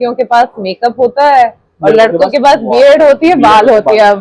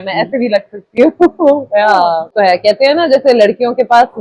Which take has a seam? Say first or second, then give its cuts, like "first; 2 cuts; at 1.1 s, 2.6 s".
second; 1 cut; at 2.3 s